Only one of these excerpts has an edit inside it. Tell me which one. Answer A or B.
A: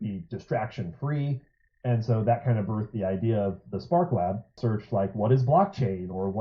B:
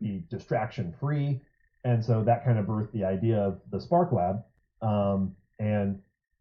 A